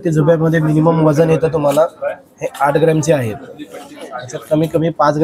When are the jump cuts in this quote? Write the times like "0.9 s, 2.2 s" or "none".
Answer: none